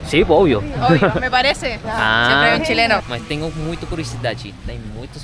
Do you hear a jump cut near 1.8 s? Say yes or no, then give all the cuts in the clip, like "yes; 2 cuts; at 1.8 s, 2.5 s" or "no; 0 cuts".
yes; 2 cuts; at 1.8 s, 3.1 s